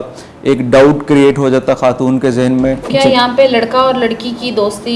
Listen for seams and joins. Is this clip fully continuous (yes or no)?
no